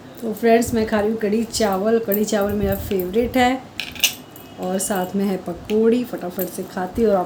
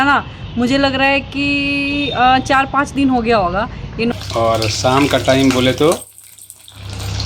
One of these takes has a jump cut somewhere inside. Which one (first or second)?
second